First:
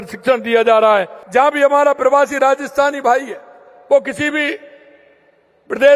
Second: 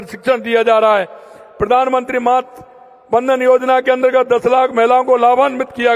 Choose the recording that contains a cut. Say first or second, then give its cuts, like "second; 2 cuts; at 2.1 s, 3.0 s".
first; 1 cut; at 1.2 s